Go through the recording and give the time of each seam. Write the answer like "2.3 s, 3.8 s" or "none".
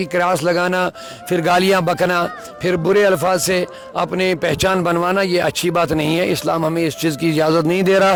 none